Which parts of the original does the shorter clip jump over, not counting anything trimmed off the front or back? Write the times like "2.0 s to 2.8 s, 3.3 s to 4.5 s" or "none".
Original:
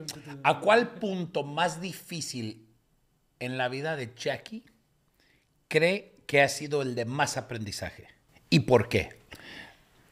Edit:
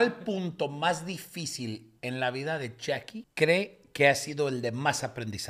2.6 s to 3.3 s, 4.6 s to 5.5 s